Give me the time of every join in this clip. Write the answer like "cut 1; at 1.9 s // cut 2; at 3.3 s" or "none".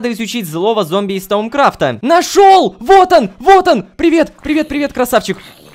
cut 1; at 2.0 s